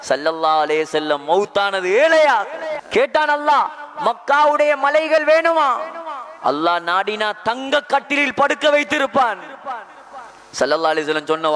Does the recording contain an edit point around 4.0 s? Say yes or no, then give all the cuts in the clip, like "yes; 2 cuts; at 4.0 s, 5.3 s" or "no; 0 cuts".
no; 1 cut; at 2.8 s